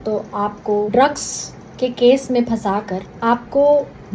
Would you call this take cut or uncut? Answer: cut